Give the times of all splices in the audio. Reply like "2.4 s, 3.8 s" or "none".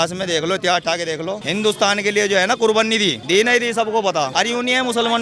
1.4 s, 3.2 s, 4.3 s

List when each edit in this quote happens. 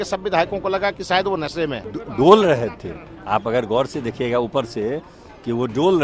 1.9 s

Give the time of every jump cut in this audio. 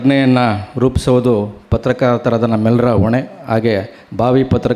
none

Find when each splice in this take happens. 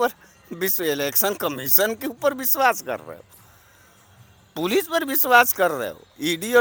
none

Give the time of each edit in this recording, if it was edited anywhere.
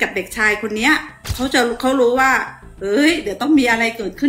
1.2 s

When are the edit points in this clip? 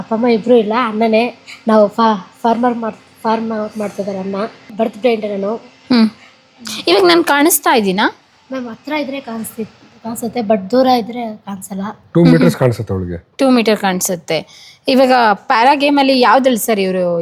none

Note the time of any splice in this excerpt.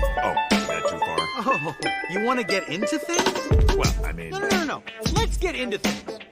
1.1 s

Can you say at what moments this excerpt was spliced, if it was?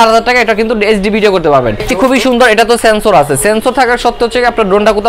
1.8 s

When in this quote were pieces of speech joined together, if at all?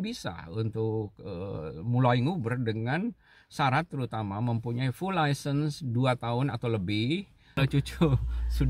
7.4 s

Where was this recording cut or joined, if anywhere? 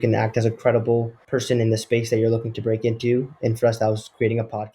1.2 s

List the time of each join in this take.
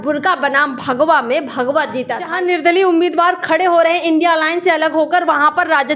2.3 s

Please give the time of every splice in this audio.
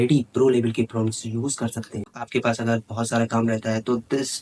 2.2 s

